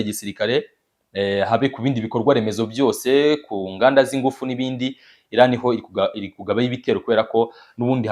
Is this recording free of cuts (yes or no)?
yes